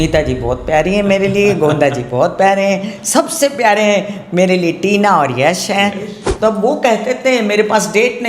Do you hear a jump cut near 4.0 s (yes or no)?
no